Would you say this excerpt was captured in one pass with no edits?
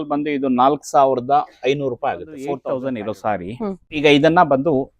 no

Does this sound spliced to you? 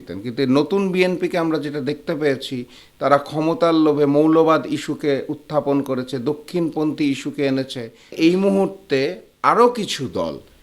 yes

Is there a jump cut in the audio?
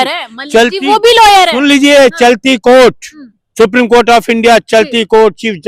no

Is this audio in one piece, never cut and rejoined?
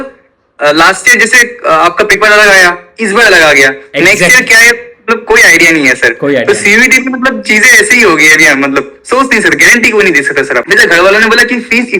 no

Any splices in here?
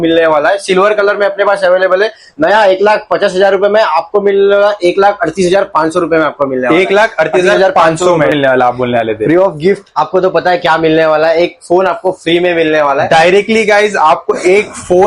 yes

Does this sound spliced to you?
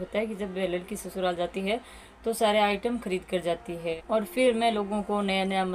yes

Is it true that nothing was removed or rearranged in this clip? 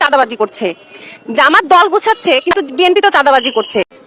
yes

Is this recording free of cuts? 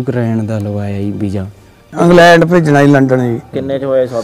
no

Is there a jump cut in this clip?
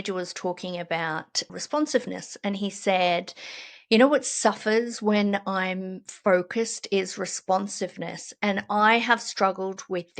no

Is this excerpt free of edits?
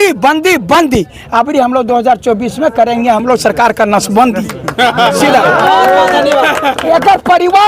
yes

